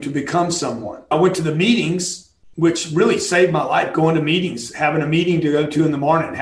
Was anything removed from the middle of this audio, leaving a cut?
yes; 1 cut; at 1.1 s

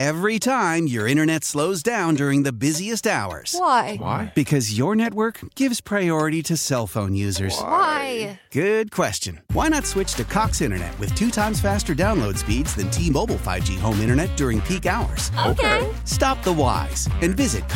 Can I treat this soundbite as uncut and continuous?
yes; 0 cuts

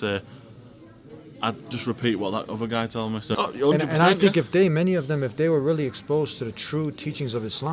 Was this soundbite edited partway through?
yes; 1 cut; at 3.3 s

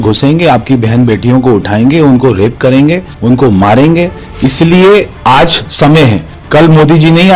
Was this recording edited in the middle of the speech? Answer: yes; 3 cuts; at 3.1 s, 4.2 s, 6.3 s

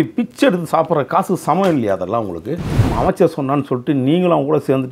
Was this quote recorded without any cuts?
no; 1 cut; at 2.9 s

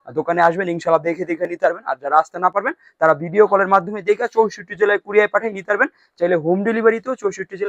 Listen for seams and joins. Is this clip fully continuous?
yes; 0 cuts

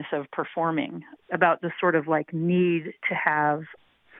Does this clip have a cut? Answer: no; 0 cuts

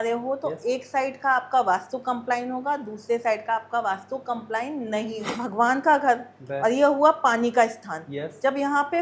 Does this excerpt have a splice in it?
yes; 1 cut; at 5.4 s

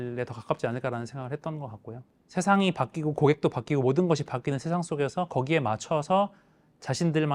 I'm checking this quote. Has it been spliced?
yes; 1 cut; at 2.2 s

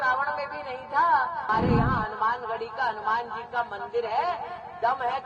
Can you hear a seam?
yes; 1 cut; at 1.5 s

